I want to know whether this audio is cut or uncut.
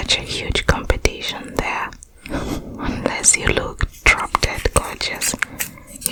uncut